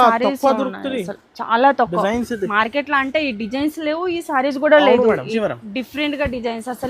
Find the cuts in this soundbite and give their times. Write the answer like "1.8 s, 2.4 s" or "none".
5.3 s